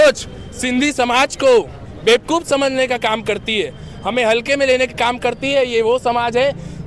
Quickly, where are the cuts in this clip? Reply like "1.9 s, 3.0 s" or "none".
none